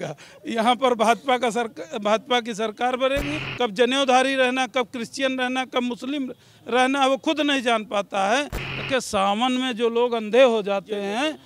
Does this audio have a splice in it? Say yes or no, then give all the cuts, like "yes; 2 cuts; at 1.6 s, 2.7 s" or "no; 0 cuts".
yes; 2 cuts; at 3.3 s, 8.6 s